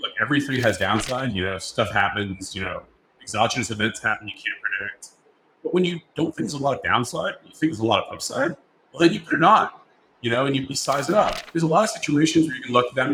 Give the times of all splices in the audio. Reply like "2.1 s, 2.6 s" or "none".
none